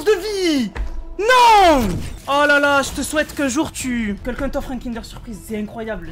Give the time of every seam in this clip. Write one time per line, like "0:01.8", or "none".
0:04.2

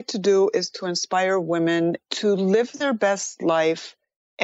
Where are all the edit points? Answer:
0:02.0
0:02.7

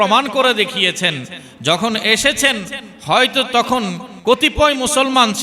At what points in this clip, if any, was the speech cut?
0:04.1

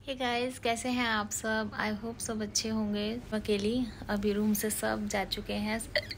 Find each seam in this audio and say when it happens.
0:03.3

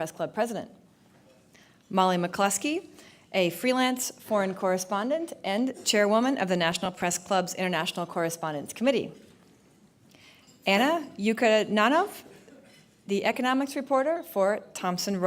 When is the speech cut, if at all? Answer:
0:11.6

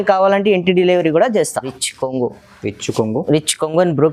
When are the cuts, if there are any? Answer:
0:01.7

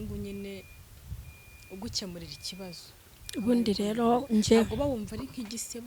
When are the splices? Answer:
none

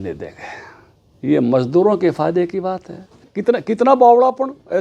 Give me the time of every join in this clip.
0:03.3

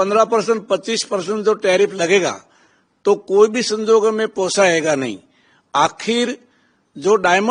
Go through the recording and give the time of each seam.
none

